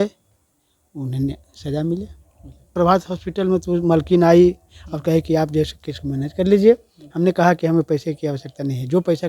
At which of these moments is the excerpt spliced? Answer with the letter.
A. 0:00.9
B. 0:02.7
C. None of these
B